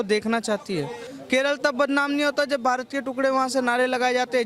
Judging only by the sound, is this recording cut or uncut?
cut